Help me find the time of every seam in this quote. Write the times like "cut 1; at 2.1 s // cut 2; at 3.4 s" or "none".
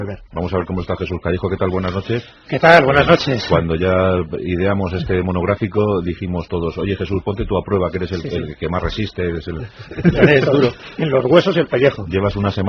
cut 1; at 4.7 s